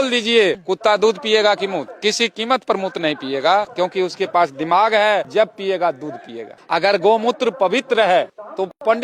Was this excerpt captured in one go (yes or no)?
yes